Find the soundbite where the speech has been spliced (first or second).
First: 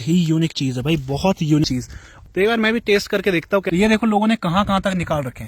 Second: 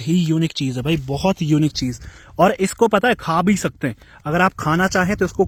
first